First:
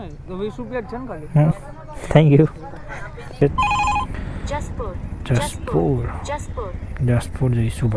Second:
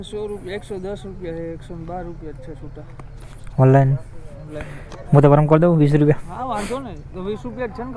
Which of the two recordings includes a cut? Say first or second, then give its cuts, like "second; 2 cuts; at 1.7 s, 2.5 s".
first; 1 cut; at 3.4 s